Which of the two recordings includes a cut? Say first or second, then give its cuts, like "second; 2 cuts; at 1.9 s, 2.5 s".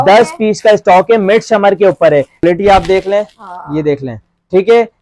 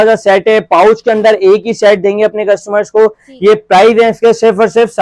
first; 1 cut; at 2.4 s